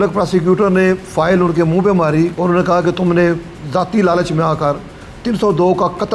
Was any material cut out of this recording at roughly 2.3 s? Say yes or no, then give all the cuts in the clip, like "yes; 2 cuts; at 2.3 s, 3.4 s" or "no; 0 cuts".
yes; 1 cut; at 2.3 s